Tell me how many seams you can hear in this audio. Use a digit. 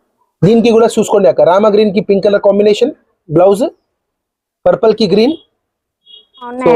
0